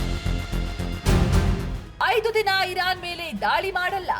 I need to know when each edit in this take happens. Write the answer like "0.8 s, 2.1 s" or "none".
2.0 s